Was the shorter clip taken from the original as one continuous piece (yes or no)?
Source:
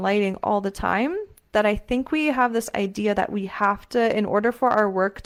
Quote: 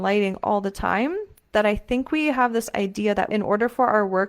no